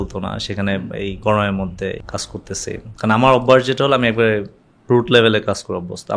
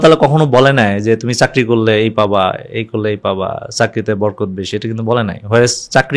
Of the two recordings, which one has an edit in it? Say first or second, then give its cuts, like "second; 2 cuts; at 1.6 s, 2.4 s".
first; 1 cut; at 2.0 s